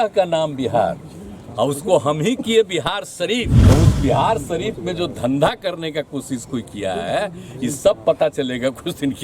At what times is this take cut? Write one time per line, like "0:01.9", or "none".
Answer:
0:03.5